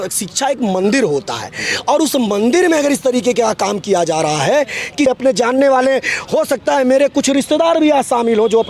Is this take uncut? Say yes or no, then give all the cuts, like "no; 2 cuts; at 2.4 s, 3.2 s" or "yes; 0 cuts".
no; 1 cut; at 5.1 s